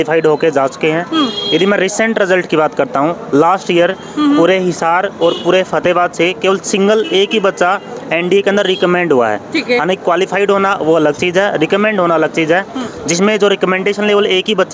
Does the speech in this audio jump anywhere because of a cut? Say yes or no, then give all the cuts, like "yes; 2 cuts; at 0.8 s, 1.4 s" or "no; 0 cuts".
no; 0 cuts